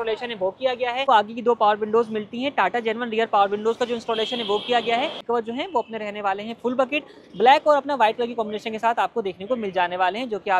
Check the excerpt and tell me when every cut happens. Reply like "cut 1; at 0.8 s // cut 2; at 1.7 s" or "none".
cut 1; at 1.0 s // cut 2; at 5.2 s